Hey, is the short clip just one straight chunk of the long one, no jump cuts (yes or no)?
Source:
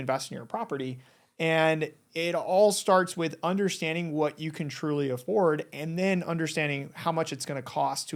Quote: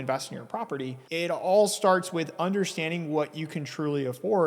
no